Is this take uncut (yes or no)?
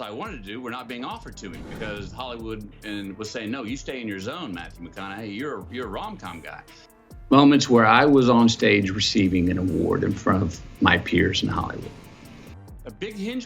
yes